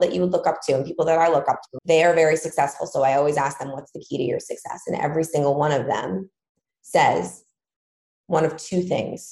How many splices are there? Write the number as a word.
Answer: one